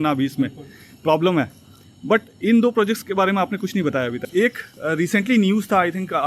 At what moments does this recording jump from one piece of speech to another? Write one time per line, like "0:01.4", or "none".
0:04.2